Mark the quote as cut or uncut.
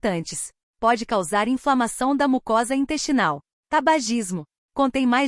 cut